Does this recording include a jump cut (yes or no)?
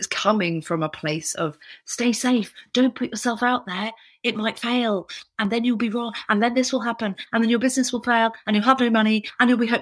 no